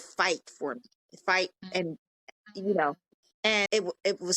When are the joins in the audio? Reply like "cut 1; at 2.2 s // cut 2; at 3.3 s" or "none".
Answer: none